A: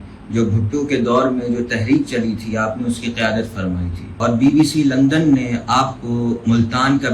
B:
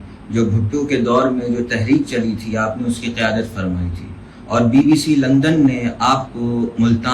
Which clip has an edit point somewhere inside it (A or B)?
A